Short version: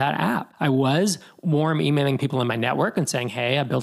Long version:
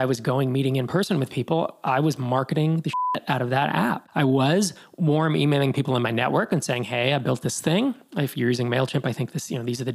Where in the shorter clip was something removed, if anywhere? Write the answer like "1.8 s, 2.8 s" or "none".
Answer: none

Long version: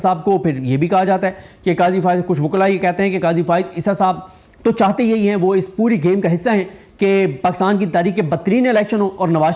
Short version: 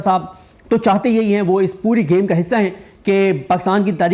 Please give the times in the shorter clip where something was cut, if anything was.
none

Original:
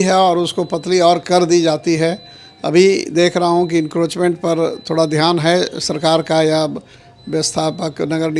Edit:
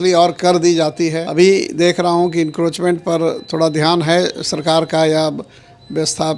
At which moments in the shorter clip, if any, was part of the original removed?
1.2 s

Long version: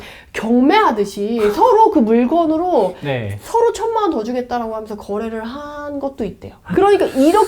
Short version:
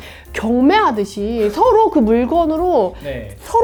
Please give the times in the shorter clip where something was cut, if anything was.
none

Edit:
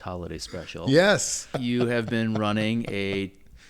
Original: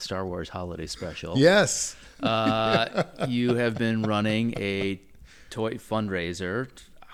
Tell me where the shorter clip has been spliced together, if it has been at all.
1.5 s

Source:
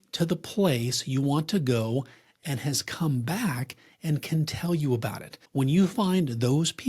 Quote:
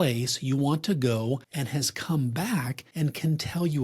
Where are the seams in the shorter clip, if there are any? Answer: 1.5 s, 2.8 s

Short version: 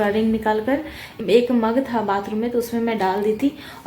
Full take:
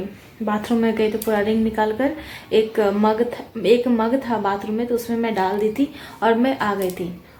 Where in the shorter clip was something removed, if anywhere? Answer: 1.0 s

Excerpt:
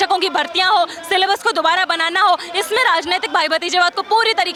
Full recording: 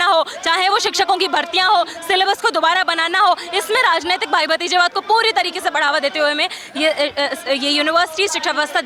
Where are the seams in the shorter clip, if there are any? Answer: none

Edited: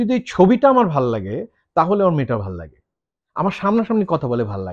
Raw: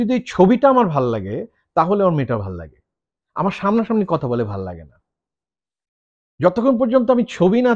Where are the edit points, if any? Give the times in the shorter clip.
none

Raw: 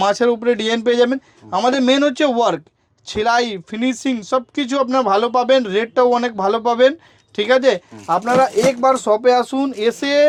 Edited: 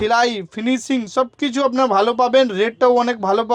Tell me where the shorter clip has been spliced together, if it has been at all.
none

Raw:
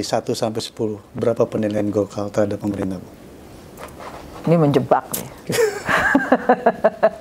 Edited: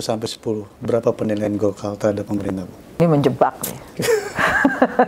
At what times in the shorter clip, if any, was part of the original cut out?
3.0 s

